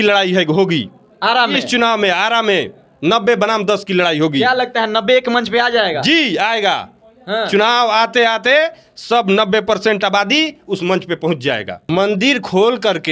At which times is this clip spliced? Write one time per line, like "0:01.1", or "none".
0:11.9